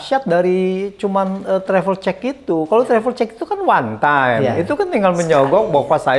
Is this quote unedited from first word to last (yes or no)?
yes